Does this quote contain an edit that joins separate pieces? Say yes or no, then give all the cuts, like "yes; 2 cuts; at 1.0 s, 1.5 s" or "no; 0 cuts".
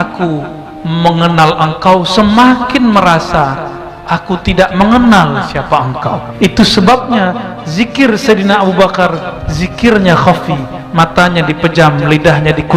yes; 1 cut; at 6.2 s